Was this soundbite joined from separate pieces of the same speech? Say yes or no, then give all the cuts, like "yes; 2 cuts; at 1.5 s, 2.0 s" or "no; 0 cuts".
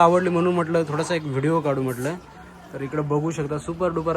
no; 0 cuts